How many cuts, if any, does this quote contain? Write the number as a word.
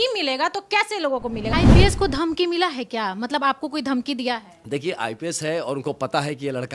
one